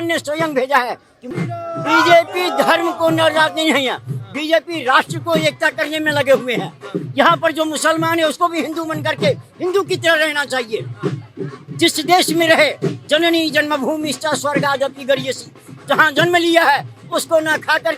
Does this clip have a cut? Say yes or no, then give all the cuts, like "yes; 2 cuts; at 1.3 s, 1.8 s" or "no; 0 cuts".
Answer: yes; 1 cut; at 1.3 s